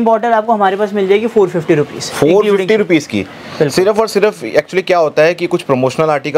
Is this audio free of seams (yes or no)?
yes